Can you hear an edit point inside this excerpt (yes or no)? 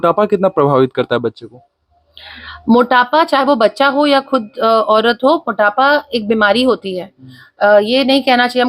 no